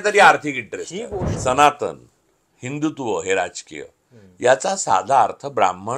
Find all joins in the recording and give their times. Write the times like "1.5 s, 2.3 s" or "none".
1.2 s